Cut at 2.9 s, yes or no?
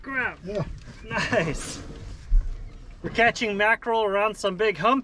no